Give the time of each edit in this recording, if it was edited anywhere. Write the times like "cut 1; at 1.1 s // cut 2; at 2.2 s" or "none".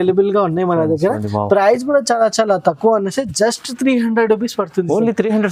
none